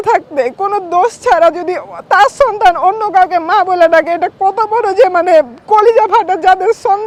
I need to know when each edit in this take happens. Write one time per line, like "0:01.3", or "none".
none